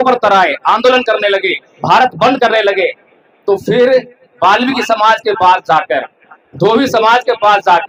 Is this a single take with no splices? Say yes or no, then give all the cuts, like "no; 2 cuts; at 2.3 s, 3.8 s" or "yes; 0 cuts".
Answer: yes; 0 cuts